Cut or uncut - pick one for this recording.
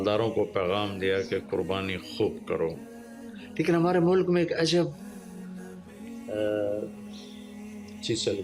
uncut